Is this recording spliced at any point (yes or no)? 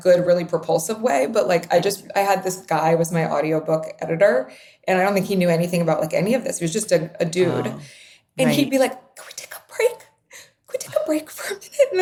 no